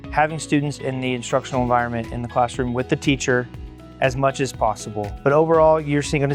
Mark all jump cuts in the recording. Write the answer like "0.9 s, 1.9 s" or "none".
5.0 s